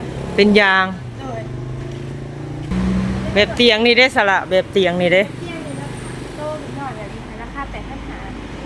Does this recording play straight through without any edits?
no; 1 cut; at 2.7 s

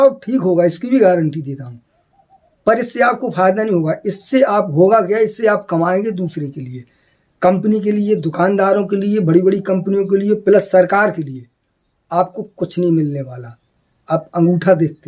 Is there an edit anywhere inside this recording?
no; 0 cuts

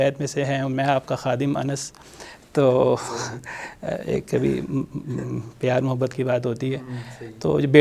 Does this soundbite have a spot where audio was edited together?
no; 0 cuts

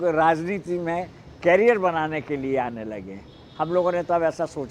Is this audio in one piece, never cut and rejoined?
yes; 0 cuts

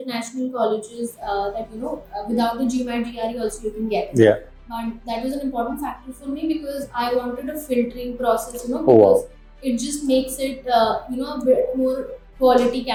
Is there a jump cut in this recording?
no; 0 cuts

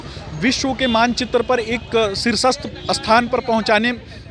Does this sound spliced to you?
no; 0 cuts

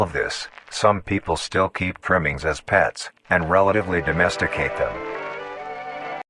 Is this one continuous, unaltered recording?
yes; 0 cuts

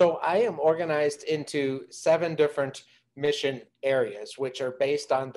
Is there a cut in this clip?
no; 0 cuts

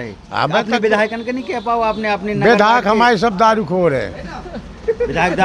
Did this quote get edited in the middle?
no; 0 cuts

